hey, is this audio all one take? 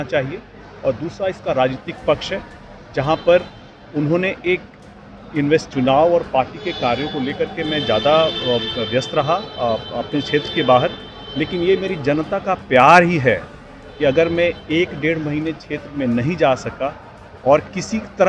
no; 1 cut; at 5.7 s

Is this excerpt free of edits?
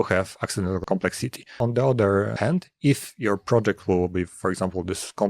no; 2 cuts; at 1.3 s, 2.3 s

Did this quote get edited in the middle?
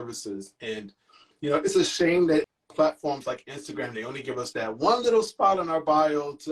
yes; 1 cut; at 2.5 s

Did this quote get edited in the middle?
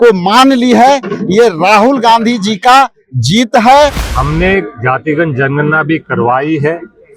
yes; 1 cut; at 4.0 s

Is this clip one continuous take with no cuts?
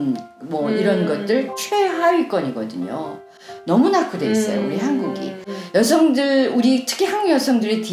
no; 1 cut; at 5.5 s

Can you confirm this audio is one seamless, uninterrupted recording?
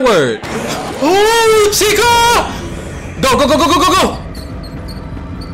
yes; 0 cuts

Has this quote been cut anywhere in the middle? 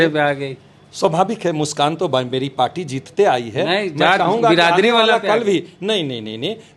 no; 0 cuts

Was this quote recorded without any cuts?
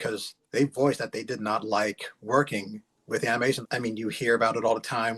no; 1 cut; at 3.6 s

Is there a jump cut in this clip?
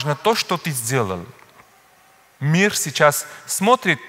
no; 0 cuts

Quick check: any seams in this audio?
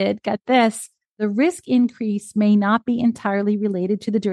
yes; 1 cut; at 1.2 s

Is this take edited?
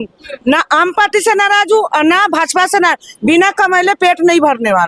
no; 0 cuts

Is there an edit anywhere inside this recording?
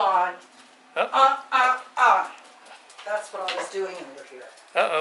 no; 0 cuts

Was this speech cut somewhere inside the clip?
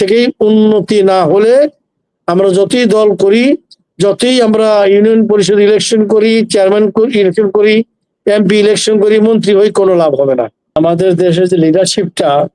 yes; 1 cut; at 10.8 s

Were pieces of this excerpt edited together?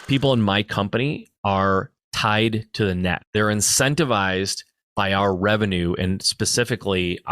yes; 2 cuts; at 1.3 s, 3.2 s

